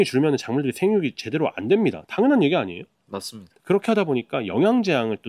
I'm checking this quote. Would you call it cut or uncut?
uncut